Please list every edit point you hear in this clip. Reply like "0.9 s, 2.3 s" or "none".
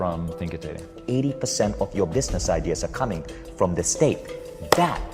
1.0 s